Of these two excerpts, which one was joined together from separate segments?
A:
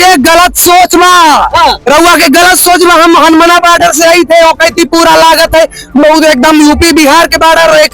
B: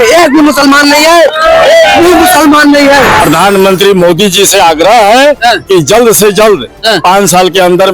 B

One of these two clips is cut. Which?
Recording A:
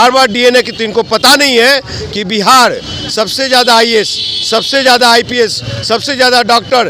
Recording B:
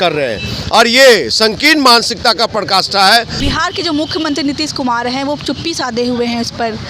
B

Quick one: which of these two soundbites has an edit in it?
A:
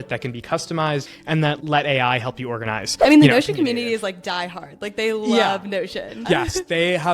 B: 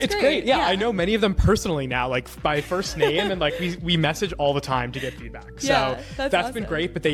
A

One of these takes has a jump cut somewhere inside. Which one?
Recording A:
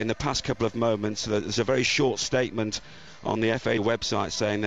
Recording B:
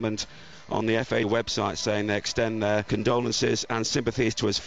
A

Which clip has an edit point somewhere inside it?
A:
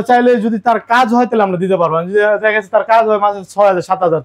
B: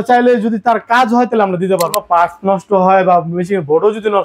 B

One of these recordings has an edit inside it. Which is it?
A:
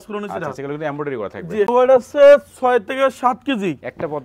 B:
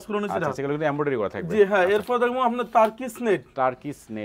A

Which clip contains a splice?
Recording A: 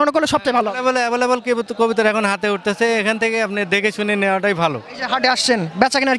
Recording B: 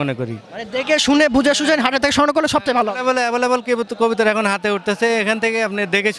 A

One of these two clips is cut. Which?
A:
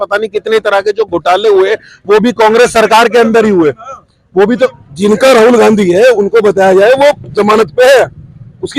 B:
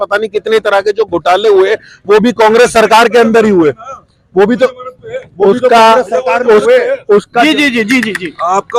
A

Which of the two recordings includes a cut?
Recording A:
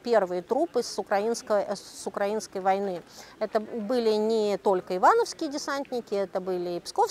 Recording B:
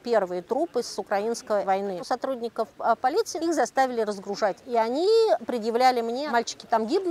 B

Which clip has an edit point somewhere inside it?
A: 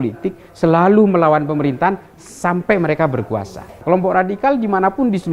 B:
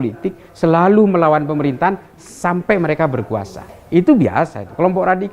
A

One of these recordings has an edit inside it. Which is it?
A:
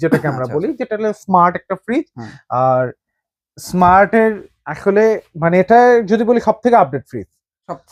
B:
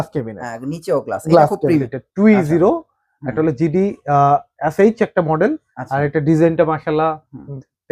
B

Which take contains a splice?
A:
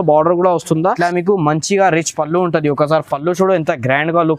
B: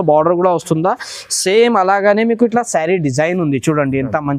A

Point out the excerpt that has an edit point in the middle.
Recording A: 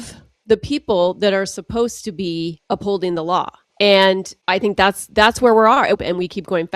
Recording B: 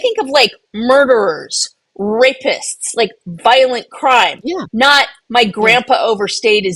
A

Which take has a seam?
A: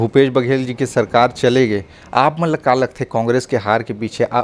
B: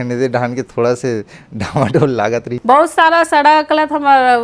B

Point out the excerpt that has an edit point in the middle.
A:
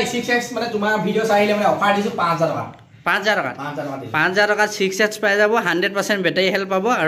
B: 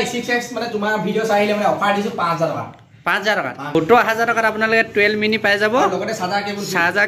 B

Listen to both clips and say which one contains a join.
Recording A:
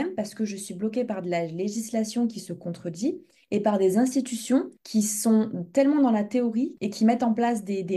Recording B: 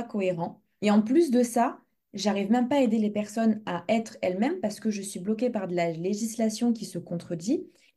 A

